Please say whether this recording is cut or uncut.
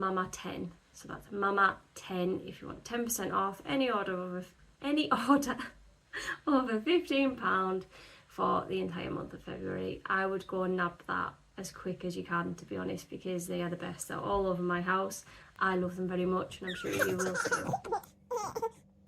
cut